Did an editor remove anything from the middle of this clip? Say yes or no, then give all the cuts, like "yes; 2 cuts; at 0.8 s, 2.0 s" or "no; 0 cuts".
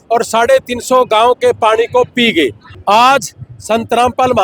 yes; 1 cut; at 2.7 s